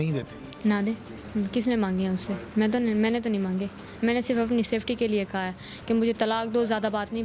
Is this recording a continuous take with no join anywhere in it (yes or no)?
yes